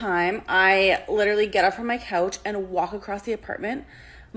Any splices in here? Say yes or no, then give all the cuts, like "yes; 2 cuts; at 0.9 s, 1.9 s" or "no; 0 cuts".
no; 0 cuts